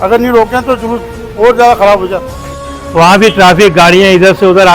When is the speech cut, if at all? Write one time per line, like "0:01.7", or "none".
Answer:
0:02.4